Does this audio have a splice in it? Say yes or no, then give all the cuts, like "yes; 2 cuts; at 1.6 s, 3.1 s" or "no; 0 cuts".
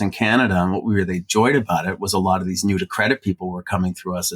no; 0 cuts